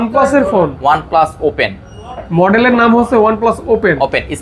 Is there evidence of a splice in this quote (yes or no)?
no